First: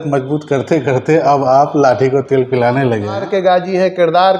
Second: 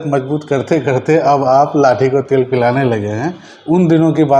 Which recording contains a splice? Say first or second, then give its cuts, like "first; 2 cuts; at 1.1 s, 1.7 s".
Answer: first; 1 cut; at 3.2 s